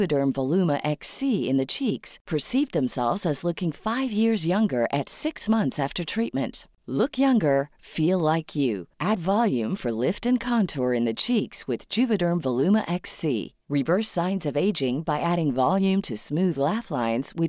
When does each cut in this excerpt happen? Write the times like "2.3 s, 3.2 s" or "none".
none